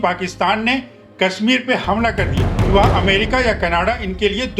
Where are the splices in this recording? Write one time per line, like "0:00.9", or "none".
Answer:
0:02.5